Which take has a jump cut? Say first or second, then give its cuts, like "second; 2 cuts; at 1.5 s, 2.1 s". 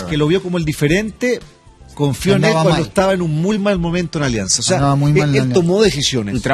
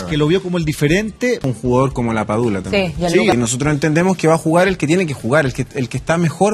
second; 2 cuts; at 1.5 s, 3.3 s